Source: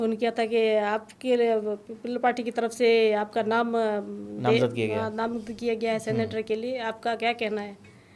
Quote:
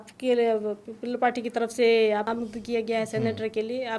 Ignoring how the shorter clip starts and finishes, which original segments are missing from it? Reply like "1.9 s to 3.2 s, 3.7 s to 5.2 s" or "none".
3.3 s to 5.2 s